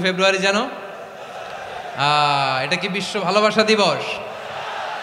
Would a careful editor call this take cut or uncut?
uncut